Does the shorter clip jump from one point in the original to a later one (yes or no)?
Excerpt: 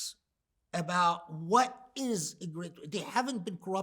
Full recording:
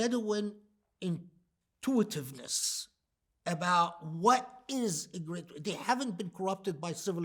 no